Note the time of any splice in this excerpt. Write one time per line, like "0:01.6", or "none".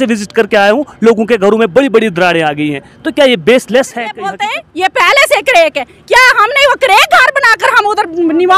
0:04.3